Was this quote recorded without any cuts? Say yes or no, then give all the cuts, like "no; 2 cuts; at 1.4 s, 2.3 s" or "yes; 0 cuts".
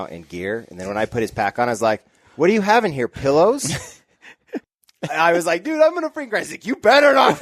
no; 1 cut; at 4.7 s